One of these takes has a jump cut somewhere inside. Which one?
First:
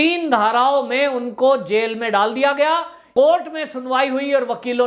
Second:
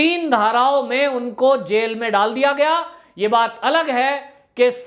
first; 1 cut; at 3.0 s

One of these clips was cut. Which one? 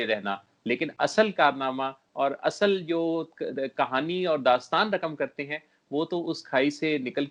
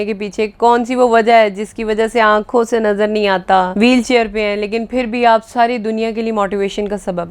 second; 1 cut; at 3.7 s

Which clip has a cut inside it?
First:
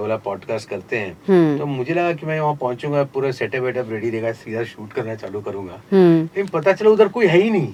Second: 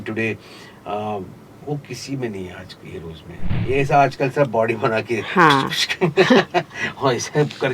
second; 1 cut; at 3.5 s

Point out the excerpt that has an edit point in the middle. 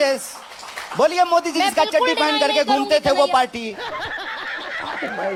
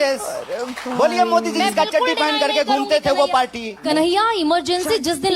second; 1 cut; at 3.8 s

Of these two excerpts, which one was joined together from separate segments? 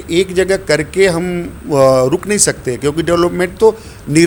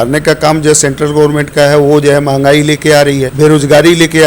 second; 1 cut; at 3.3 s

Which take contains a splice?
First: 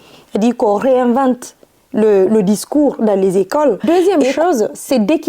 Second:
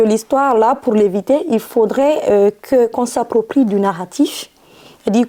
first; 1 cut; at 3.8 s

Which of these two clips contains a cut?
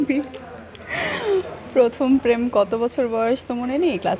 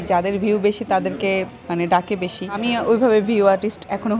second; 1 cut; at 2.6 s

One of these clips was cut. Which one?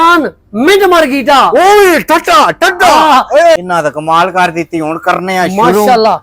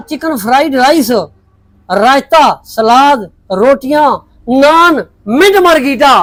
first; 1 cut; at 3.6 s

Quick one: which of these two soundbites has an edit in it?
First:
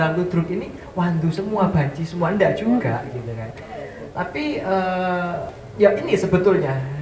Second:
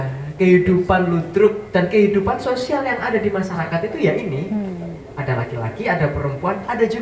first; 1 cut; at 5.6 s

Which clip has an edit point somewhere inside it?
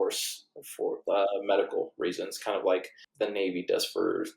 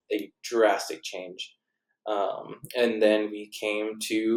first; 1 cut; at 3.0 s

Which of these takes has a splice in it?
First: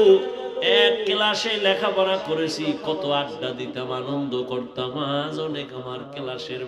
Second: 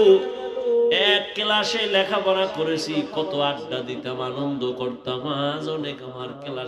first; 1 cut; at 1.1 s

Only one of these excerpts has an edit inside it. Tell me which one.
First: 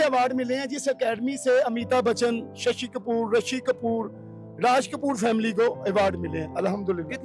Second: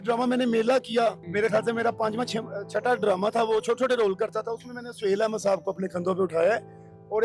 second; 1 cut; at 1.2 s

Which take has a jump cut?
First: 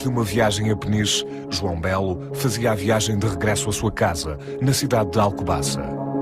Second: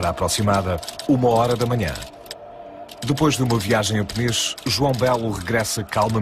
second; 1 cut; at 1.7 s

